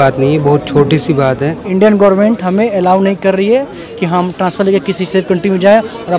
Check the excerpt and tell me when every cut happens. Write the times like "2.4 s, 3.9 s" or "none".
1.6 s